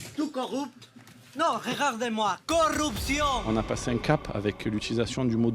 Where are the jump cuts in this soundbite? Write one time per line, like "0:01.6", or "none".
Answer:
0:03.4